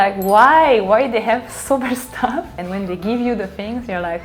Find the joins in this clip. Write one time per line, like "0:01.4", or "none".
0:02.6